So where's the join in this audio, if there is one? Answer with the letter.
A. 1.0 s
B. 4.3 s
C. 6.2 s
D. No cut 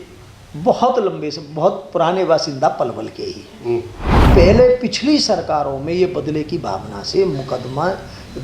B